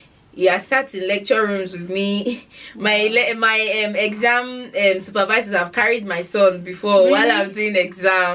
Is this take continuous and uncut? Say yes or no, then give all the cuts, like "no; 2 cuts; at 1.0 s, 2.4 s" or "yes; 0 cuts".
yes; 0 cuts